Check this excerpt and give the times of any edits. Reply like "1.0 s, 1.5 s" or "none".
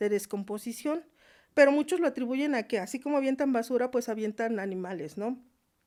none